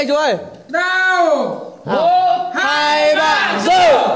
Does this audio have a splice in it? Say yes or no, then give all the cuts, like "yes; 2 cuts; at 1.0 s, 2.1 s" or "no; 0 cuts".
no; 0 cuts